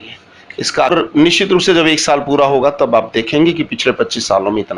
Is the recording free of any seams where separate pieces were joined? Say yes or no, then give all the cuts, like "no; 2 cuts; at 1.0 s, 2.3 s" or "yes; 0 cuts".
no; 1 cut; at 0.9 s